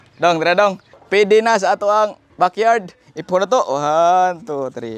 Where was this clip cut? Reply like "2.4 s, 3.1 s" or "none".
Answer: 0.9 s